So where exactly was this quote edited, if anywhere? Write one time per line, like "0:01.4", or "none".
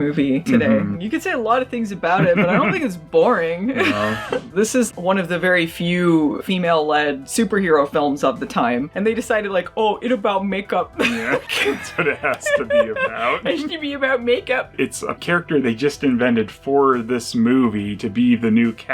0:01.0
0:04.5
0:11.5
0:14.7

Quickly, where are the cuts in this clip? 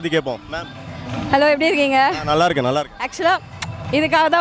none

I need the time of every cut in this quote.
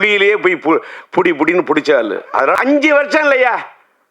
0:02.6

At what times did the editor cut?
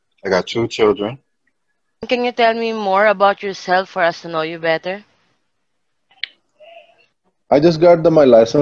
0:01.7

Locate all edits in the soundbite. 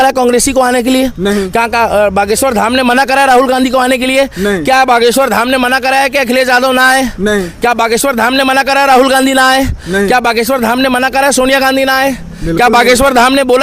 none

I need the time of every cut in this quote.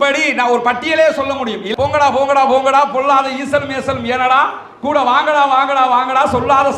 0:01.7

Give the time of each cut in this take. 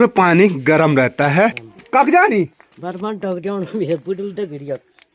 0:01.7

